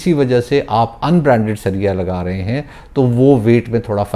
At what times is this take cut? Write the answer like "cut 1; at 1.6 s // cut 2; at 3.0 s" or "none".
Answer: none